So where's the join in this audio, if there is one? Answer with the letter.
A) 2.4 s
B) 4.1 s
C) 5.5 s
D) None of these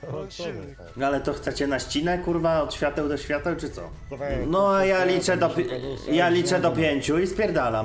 B